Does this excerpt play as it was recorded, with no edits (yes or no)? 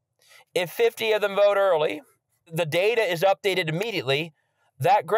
no